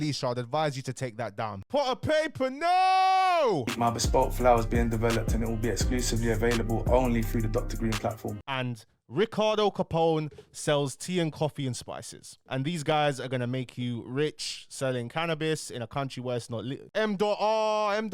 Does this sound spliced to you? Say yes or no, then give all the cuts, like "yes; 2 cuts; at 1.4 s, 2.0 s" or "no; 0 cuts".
yes; 4 cuts; at 1.6 s, 3.7 s, 8.4 s, 16.8 s